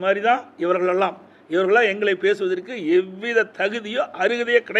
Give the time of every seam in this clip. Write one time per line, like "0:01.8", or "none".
none